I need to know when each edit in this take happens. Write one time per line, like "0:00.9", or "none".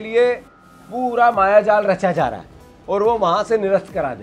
none